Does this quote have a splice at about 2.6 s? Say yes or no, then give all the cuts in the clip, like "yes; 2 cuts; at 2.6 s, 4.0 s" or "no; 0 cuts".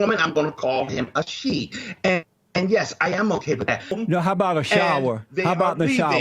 no; 1 cut; at 4.0 s